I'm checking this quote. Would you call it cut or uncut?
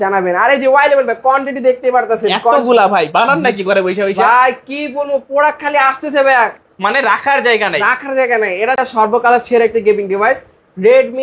cut